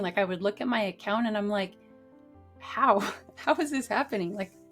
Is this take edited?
no; 0 cuts

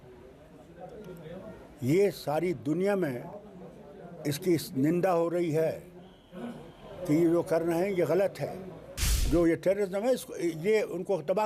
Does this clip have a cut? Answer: yes; 1 cut; at 9.1 s

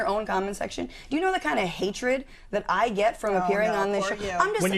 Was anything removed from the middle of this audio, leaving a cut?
no; 0 cuts

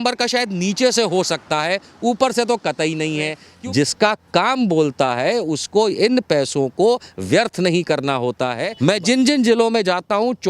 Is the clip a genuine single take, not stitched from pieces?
no; 2 cuts; at 3.4 s, 8.7 s

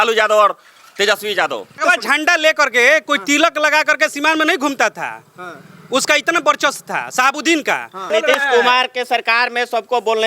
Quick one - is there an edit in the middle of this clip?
yes; 2 cuts; at 1.8 s, 8.1 s

